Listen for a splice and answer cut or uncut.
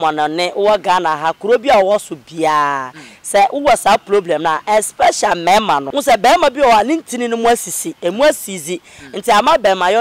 cut